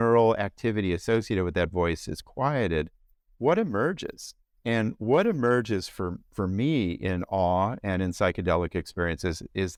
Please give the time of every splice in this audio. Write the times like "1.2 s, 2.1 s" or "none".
none